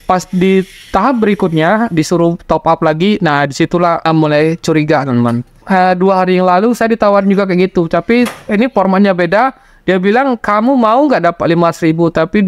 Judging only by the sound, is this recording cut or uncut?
cut